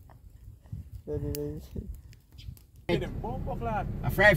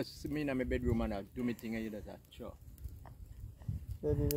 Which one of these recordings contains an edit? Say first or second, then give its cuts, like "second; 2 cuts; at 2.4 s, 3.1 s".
first; 1 cut; at 2.9 s